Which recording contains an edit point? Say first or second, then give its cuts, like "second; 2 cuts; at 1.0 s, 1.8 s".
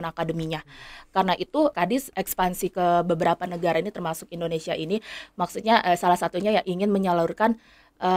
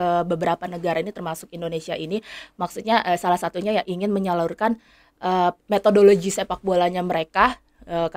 first; 1 cut; at 1.8 s